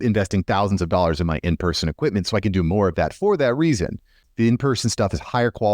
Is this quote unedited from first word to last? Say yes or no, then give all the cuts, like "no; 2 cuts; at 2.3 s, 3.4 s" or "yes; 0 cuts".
no; 1 cut; at 4.2 s